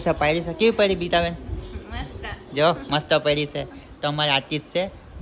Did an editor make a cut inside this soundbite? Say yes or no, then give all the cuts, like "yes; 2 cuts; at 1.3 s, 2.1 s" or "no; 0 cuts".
no; 0 cuts